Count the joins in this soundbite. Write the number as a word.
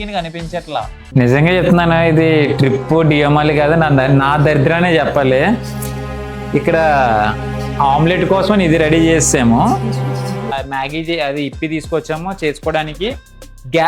two